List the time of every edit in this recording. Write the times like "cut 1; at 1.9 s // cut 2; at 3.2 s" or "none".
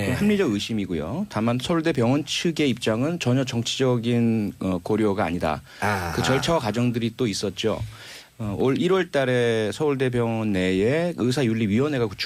cut 1; at 7.6 s